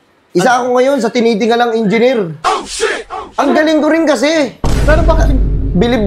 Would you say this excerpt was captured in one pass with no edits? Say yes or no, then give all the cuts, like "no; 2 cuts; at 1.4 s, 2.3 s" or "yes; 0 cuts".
yes; 0 cuts